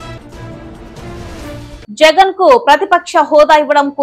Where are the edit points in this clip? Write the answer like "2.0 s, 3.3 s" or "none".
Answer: 1.7 s